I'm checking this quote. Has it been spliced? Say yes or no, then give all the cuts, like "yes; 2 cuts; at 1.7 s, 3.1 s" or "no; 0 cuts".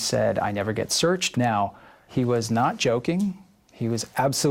yes; 1 cut; at 1.3 s